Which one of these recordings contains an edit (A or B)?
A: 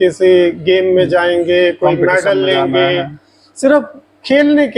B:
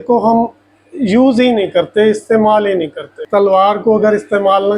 B